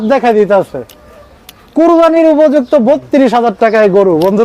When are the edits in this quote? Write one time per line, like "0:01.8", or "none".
none